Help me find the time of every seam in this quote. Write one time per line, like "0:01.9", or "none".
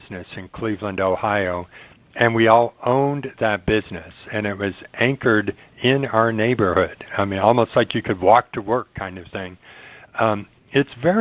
none